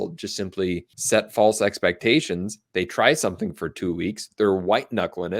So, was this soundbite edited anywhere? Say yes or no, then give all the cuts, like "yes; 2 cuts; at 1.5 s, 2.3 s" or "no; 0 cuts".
yes; 1 cut; at 0.9 s